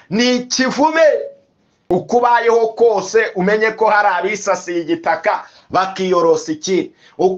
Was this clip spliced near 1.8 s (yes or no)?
yes